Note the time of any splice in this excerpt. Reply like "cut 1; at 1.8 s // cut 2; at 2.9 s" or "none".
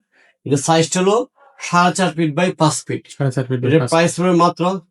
none